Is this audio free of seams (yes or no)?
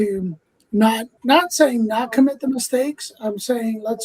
no